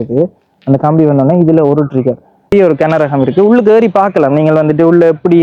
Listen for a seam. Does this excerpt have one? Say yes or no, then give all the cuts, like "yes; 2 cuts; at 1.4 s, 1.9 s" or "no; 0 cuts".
yes; 1 cut; at 2.5 s